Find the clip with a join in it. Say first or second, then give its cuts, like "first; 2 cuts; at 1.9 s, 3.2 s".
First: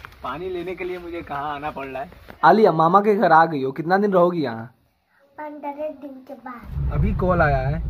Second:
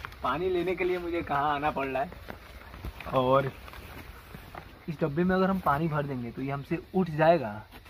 first; 2 cuts; at 2.3 s, 6.6 s